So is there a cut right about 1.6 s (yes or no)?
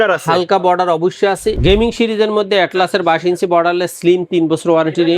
yes